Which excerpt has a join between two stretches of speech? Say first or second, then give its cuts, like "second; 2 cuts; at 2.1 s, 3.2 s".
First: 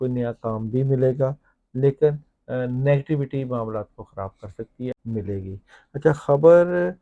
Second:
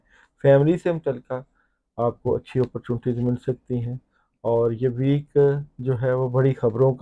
first; 1 cut; at 5.0 s